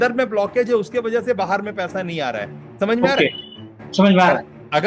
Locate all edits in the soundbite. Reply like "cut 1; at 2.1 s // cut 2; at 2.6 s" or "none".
cut 1; at 2.6 s